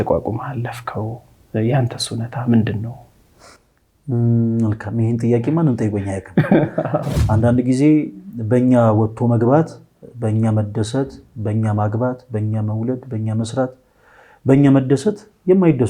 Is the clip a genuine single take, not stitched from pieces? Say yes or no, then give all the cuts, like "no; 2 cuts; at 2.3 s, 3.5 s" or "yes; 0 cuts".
no; 1 cut; at 7.1 s